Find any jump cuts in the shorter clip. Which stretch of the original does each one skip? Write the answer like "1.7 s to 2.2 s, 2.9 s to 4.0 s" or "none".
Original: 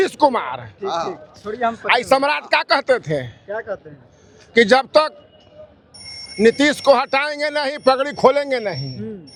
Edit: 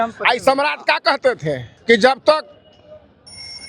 3.3 s to 4.4 s